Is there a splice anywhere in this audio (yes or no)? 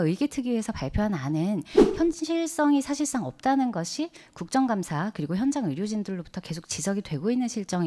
no